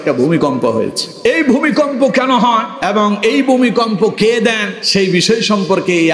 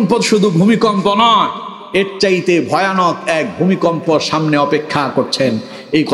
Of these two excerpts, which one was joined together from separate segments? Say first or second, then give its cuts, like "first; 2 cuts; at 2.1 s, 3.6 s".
first; 3 cuts; at 1.0 s, 2.7 s, 4.7 s